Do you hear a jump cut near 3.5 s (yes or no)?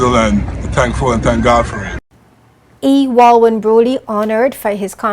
no